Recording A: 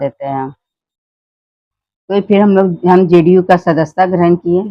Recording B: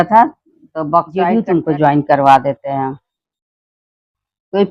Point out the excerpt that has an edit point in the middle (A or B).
B